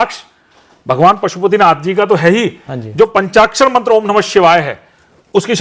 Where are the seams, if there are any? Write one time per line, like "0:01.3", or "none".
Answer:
none